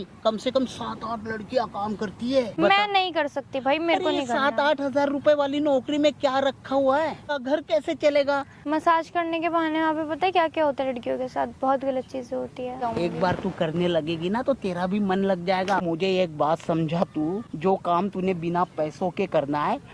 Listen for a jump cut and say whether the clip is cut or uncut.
cut